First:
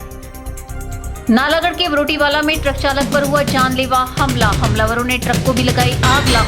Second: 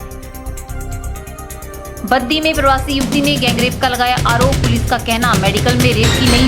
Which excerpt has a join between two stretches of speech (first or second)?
second